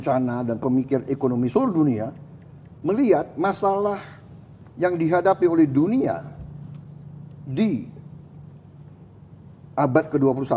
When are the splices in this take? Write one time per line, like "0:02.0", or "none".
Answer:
none

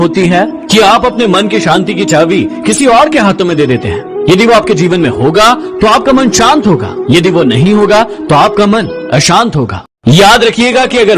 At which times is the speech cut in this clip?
0:09.8

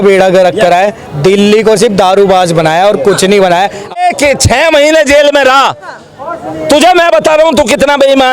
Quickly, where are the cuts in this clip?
0:04.0

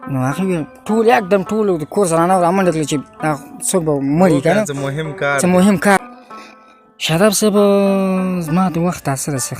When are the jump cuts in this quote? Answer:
0:06.0

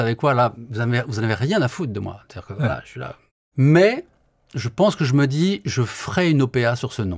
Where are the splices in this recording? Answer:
0:03.4

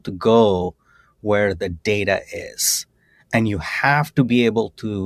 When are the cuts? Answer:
none

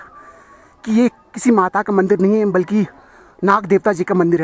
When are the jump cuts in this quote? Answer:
none

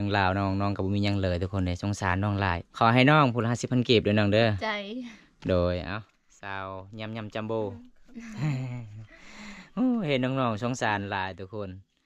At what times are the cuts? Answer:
0:02.6

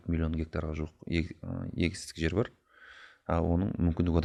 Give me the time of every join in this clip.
none

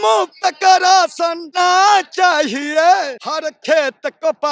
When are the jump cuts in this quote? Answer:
0:01.4
0:03.2

